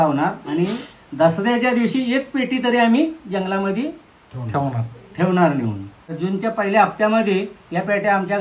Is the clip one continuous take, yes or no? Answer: no